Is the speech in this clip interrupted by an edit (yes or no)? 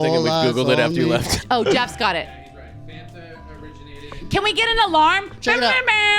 yes